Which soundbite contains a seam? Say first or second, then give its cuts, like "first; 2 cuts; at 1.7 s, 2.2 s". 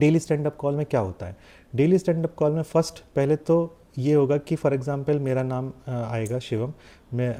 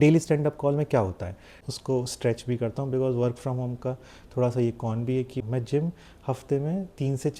second; 2 cuts; at 1.6 s, 5.3 s